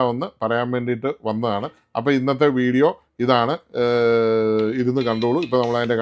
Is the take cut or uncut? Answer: uncut